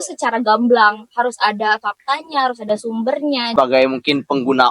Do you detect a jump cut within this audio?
yes; 1 cut; at 3.5 s

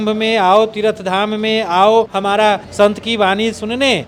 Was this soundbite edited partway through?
no; 0 cuts

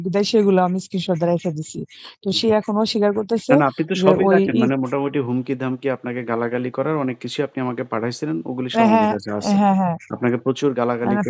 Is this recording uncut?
yes; 0 cuts

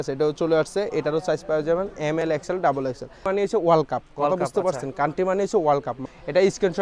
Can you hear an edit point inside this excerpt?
yes; 2 cuts; at 3.3 s, 6.0 s

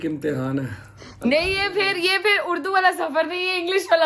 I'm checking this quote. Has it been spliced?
no; 0 cuts

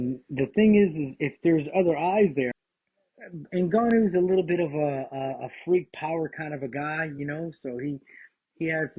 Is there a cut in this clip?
yes; 1 cut; at 2.6 s

